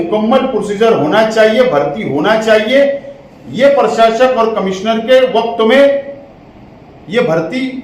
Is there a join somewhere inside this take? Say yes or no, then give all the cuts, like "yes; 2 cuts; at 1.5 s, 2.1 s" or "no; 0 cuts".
no; 0 cuts